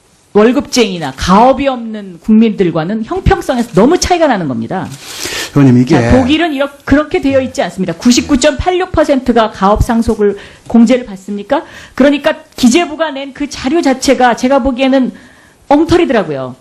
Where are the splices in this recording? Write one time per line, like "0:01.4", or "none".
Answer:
none

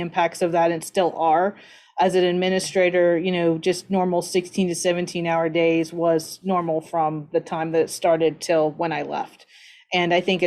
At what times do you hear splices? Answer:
none

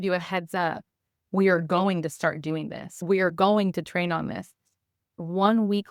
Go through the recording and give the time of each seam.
none

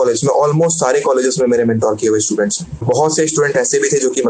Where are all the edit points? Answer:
0:02.8

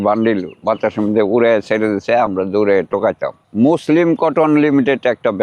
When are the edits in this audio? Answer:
0:03.4

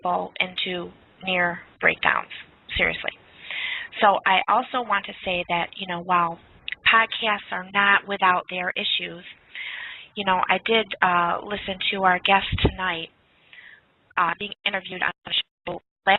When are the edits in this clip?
none

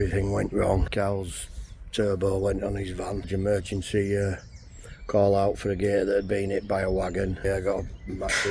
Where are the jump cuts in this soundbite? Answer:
0:00.9
0:03.3
0:07.4

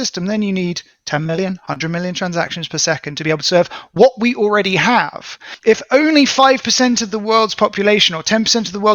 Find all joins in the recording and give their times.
0:05.5

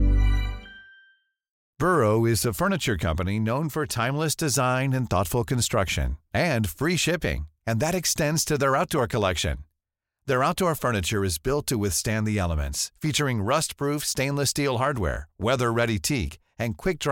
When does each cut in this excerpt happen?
0:01.5

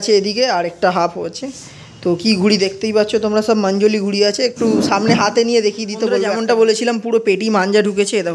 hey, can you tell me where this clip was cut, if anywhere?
0:06.3

